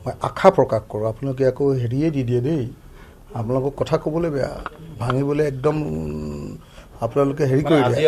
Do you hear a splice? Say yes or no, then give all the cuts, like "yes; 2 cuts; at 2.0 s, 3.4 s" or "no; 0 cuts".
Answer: no; 0 cuts